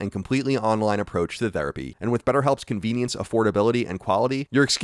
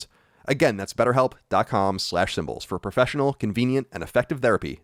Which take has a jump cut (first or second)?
first